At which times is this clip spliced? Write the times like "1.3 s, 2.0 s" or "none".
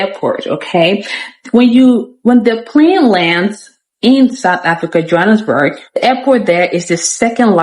6.0 s